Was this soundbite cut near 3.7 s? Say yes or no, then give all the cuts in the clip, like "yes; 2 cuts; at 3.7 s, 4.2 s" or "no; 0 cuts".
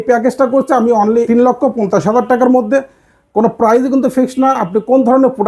no; 1 cut; at 1.3 s